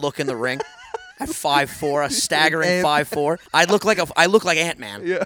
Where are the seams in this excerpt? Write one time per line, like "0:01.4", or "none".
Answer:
0:03.4